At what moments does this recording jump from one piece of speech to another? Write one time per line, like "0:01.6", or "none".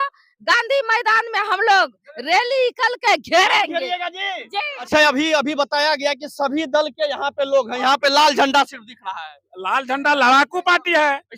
0:04.9